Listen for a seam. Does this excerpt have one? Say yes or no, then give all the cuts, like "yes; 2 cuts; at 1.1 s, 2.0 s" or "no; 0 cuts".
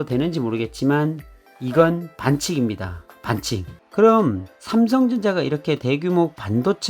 yes; 1 cut; at 3.8 s